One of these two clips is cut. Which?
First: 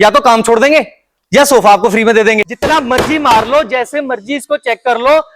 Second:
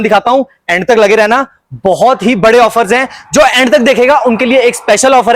first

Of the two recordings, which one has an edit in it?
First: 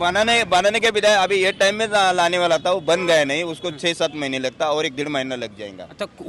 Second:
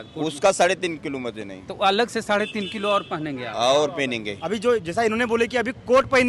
second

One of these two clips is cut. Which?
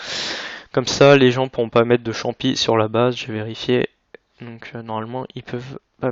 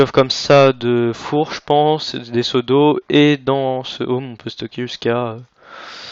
first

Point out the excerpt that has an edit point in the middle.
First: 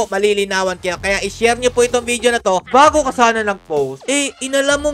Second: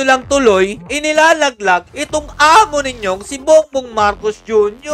first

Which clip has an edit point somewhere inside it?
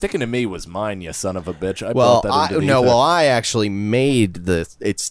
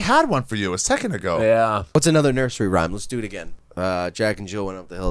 second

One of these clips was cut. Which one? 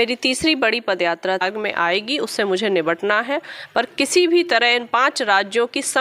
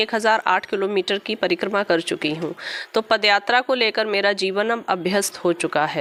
first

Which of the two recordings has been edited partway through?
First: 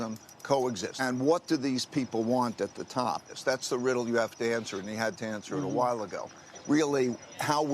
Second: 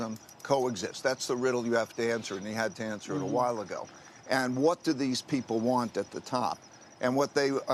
first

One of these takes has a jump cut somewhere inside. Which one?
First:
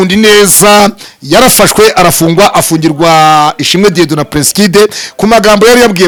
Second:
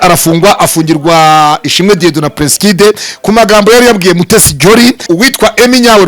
second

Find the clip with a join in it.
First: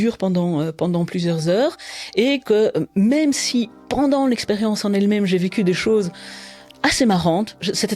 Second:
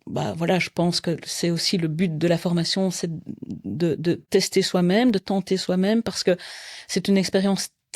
second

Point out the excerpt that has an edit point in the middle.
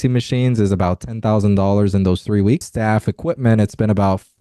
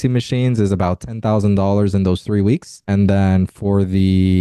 first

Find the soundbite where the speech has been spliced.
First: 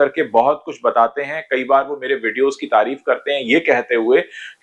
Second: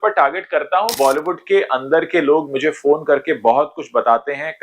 second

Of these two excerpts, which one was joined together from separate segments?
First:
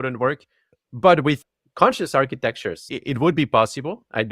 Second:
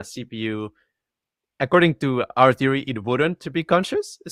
first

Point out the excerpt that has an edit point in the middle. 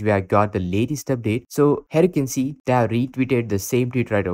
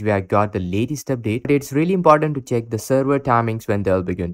second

